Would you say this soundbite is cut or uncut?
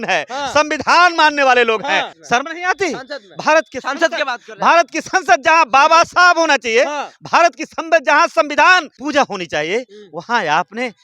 cut